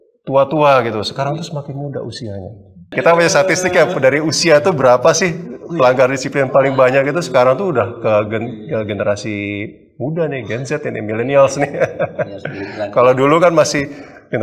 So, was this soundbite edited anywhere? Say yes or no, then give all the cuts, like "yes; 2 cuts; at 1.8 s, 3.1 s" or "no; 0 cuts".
yes; 1 cut; at 2.9 s